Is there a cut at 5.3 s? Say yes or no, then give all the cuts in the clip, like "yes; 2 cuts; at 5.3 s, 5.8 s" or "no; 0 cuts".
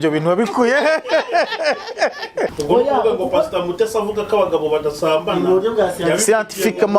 no; 1 cut; at 2.5 s